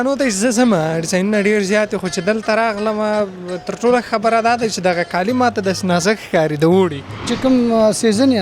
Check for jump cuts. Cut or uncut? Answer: cut